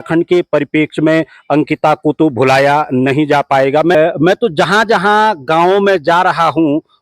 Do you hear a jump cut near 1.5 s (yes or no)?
no